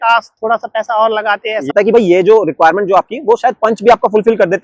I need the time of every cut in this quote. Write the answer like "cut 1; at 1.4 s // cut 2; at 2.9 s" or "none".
cut 1; at 1.7 s